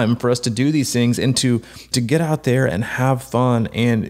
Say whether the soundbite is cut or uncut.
cut